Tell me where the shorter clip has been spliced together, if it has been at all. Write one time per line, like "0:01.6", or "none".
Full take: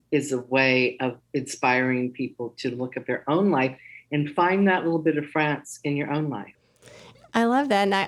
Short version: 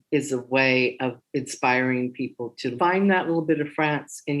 0:02.7